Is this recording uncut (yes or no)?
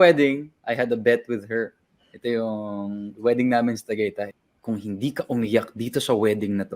no